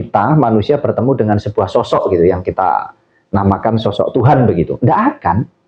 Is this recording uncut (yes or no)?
yes